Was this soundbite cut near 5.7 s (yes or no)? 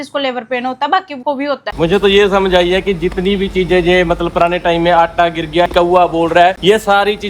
yes